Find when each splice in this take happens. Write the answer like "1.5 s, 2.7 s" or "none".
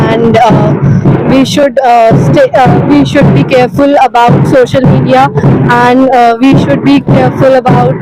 none